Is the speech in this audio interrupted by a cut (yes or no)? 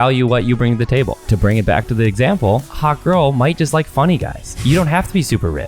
yes